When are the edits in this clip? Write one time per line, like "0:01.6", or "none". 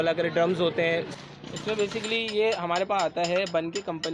0:01.1